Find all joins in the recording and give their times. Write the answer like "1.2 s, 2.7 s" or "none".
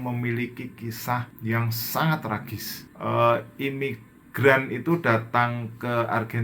1.3 s, 2.9 s